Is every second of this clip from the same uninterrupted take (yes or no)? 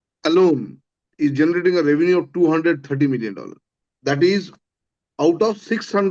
no